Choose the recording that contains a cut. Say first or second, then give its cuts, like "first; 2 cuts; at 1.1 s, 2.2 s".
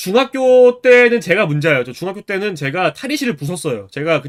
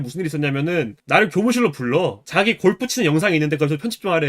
second; 2 cuts; at 1.0 s, 2.2 s